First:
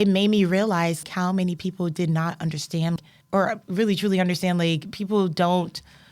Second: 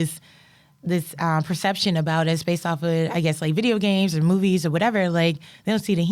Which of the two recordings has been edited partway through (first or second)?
first